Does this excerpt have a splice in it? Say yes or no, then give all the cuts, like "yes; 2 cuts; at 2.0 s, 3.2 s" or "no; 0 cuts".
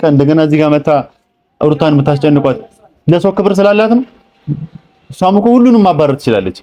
no; 0 cuts